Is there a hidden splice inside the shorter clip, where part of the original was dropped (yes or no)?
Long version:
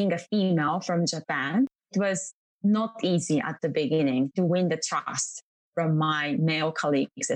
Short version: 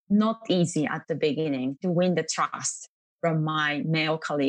no